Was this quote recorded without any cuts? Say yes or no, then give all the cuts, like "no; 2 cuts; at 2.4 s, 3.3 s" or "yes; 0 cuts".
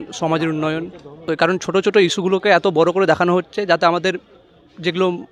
no; 1 cut; at 1.2 s